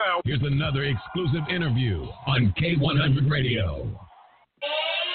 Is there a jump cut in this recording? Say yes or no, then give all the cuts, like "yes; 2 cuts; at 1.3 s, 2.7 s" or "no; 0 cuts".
yes; 1 cut; at 3.9 s